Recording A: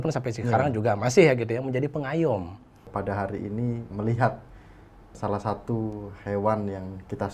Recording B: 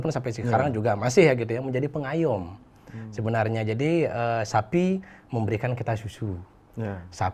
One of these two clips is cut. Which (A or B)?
A